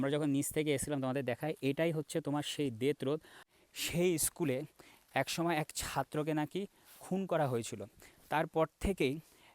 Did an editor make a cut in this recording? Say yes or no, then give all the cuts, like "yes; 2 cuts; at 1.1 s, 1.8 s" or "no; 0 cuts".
yes; 1 cut; at 3.4 s